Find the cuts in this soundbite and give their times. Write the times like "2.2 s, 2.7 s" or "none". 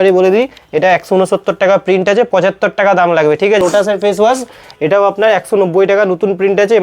3.6 s